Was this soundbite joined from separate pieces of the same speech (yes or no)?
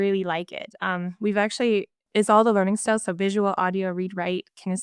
yes